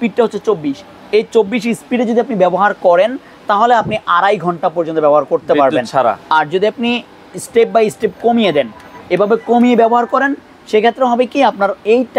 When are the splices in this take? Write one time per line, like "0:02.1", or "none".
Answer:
none